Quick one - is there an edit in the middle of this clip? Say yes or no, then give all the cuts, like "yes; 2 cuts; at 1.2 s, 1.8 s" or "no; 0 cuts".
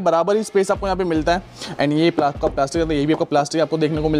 yes; 1 cut; at 1.5 s